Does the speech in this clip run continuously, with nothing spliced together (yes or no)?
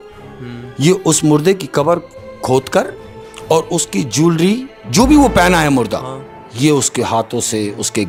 yes